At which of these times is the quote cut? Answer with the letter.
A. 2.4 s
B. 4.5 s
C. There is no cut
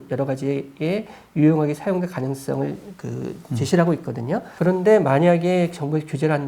B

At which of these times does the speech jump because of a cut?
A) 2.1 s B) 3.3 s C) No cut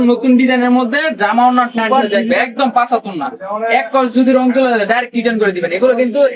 A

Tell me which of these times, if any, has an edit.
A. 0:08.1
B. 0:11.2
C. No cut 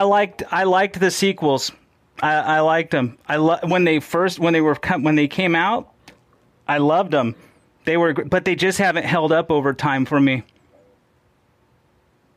B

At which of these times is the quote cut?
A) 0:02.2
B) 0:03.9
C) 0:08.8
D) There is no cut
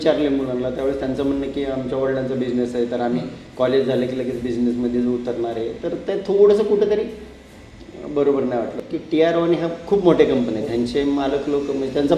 C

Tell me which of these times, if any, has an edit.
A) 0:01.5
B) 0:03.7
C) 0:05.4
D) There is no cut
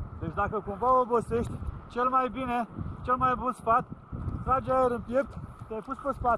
D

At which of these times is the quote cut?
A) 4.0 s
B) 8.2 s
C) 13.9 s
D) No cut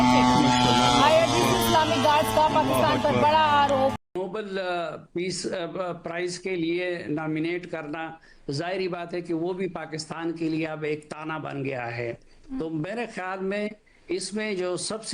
A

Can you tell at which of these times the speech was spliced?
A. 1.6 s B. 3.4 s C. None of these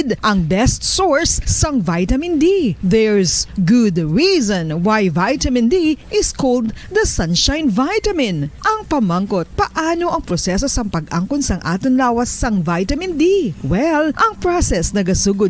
B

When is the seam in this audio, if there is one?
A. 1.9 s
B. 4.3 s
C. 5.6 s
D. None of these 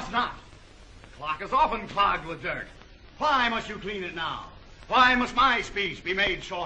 C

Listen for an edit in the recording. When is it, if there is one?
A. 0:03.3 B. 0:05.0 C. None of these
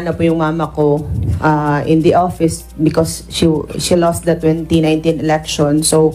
C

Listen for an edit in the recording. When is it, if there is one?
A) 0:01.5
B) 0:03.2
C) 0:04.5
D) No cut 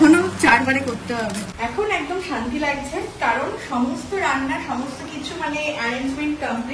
A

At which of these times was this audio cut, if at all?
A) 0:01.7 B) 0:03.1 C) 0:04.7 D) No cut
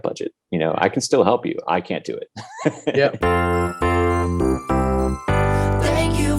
B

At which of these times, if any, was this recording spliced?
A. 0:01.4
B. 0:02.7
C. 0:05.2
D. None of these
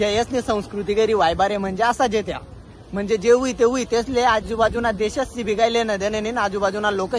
D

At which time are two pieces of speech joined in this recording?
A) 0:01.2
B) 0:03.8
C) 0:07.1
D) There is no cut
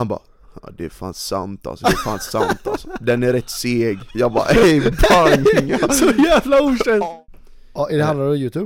C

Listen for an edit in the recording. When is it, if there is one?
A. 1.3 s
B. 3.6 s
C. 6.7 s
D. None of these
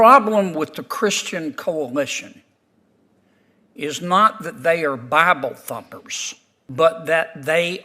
C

